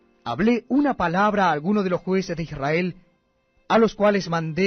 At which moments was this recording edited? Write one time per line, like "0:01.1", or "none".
0:03.8